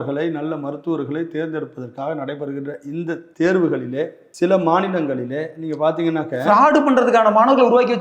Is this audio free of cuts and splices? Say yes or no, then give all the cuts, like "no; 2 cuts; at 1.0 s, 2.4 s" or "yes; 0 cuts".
no; 2 cuts; at 3.3 s, 4.2 s